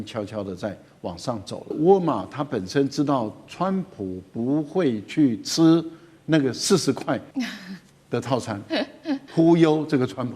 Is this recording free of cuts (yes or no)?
no